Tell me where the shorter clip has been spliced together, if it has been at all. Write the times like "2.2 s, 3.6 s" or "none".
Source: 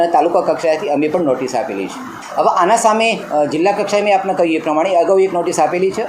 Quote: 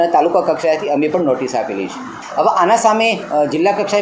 none